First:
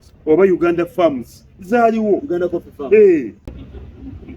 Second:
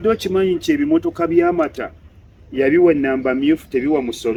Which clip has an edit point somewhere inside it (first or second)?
first